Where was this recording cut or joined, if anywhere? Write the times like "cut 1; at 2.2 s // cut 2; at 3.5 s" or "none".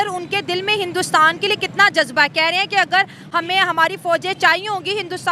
none